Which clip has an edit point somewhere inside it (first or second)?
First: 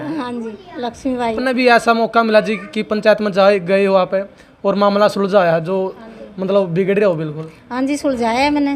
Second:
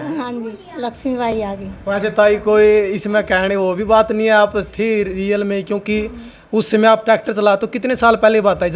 first